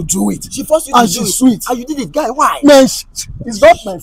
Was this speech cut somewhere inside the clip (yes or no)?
no